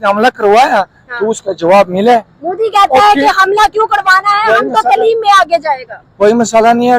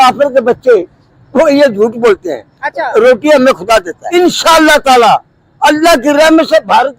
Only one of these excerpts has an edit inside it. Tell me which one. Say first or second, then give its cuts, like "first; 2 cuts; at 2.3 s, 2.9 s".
second; 1 cut; at 4.0 s